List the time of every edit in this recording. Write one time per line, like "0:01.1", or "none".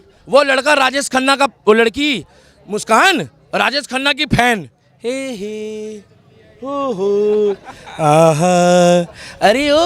none